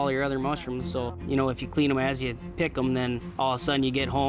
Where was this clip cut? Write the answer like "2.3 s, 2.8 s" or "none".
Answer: 1.2 s, 3.3 s